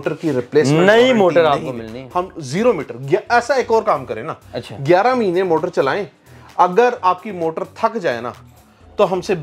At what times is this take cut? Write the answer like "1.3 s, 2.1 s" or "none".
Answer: none

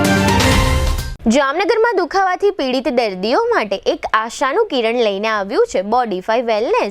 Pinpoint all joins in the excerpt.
1.0 s

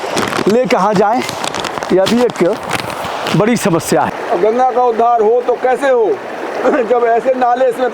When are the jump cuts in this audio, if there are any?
4.1 s

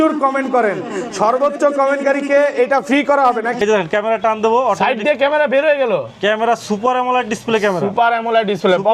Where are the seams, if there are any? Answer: 3.6 s

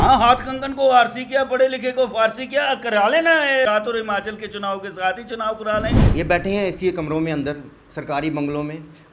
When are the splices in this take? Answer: 3.7 s, 6.0 s

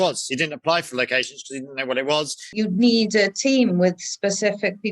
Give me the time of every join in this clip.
2.4 s

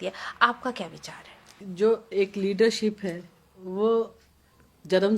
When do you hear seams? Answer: 1.6 s

